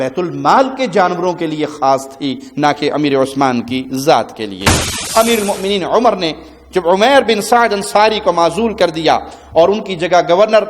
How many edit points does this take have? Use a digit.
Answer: 1